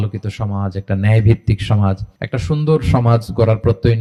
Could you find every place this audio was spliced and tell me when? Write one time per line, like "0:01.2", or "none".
none